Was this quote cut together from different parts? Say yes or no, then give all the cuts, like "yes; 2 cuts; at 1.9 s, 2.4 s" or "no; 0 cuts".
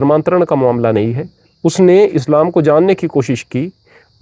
no; 0 cuts